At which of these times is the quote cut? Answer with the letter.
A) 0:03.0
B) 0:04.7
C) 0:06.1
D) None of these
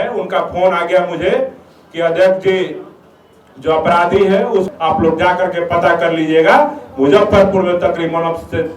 B